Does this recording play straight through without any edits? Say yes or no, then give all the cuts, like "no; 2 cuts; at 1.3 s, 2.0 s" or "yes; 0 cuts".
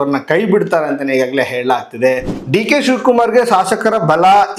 no; 1 cut; at 2.3 s